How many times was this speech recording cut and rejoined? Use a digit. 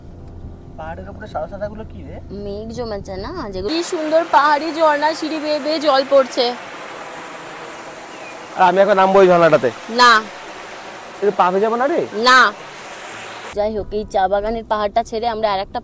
2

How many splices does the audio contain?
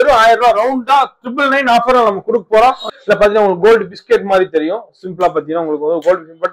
1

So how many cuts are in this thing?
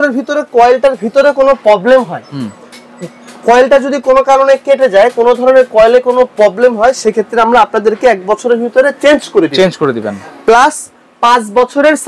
0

